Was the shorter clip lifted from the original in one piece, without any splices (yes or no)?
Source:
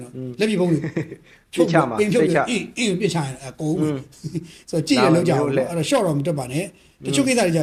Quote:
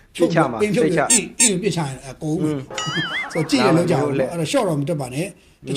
yes